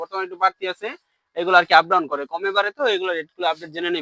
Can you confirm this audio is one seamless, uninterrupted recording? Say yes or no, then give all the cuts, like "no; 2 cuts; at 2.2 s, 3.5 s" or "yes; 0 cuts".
yes; 0 cuts